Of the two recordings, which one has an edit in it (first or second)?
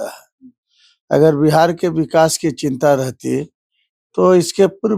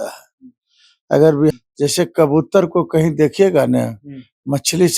second